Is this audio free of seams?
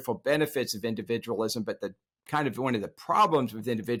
yes; 0 cuts

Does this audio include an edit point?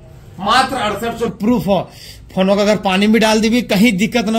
yes; 1 cut; at 1.3 s

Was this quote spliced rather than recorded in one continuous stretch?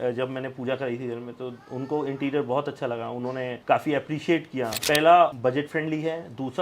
yes; 1 cut; at 4.8 s

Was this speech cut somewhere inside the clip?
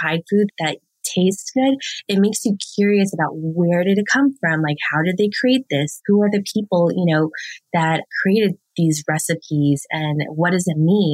no; 0 cuts

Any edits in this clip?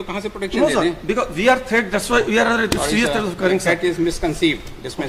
no; 0 cuts

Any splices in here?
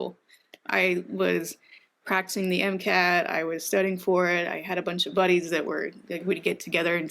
no; 0 cuts

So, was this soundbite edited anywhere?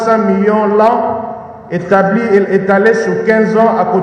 no; 0 cuts

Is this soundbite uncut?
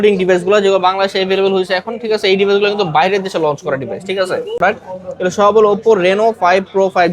no; 1 cut; at 4.6 s

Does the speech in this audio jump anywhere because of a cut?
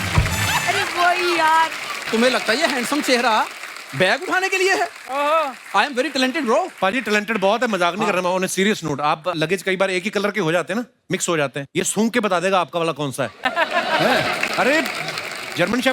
yes; 1 cut; at 2.1 s

